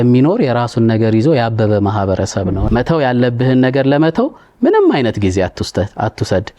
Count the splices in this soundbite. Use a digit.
1